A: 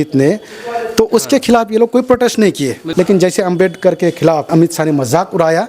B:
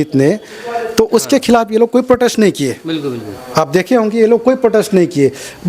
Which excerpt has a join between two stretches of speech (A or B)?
A